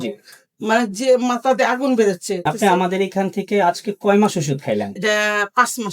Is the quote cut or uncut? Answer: cut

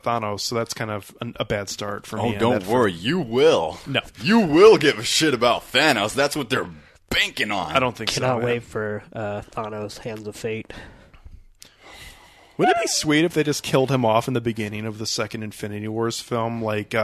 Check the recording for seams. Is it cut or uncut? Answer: uncut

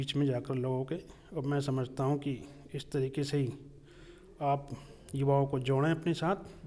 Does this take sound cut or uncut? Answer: uncut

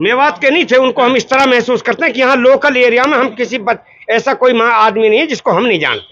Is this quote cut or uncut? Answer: uncut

